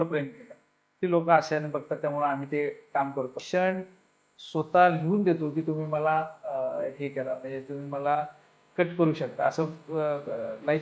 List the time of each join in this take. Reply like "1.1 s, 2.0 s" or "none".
3.4 s

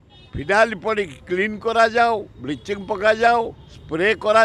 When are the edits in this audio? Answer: none

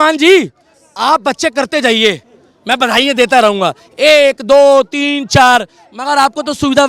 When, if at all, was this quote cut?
none

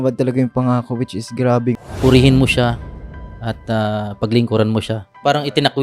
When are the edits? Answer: 1.9 s

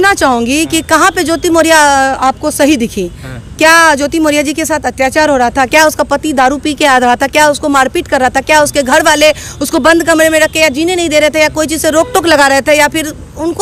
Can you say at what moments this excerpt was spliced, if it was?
none

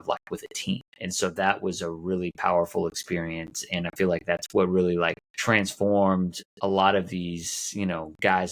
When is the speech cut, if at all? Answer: 1.0 s, 5.3 s, 6.4 s

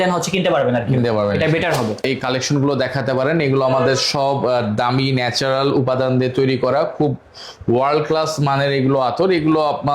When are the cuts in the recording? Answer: 2.0 s

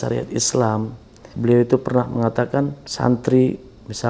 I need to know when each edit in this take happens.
1.3 s, 2.8 s

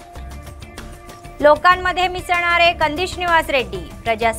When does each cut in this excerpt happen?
0.9 s

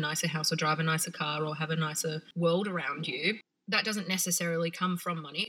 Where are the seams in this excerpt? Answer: 2.3 s, 3.5 s

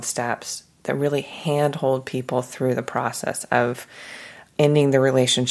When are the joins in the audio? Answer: 4.5 s

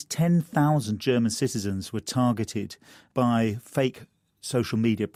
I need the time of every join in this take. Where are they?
none

